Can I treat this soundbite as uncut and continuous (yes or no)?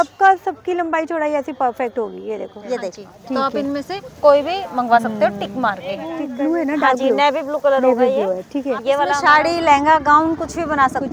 no